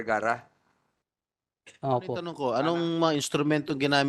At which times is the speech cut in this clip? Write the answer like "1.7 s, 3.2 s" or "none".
2.3 s